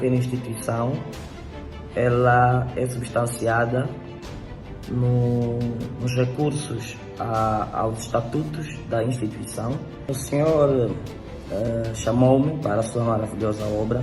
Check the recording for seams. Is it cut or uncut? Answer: cut